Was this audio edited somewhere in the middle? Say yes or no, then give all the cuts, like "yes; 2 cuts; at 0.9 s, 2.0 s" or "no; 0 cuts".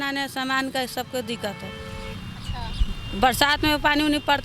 no; 0 cuts